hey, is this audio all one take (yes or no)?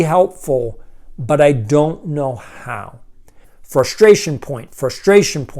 no